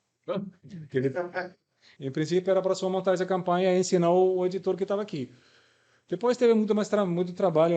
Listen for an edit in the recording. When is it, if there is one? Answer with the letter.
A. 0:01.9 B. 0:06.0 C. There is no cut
A